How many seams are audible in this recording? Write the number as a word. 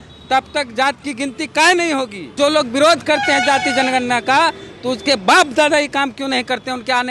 one